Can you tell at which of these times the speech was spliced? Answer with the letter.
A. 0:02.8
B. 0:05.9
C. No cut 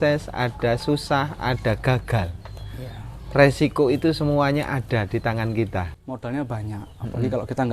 B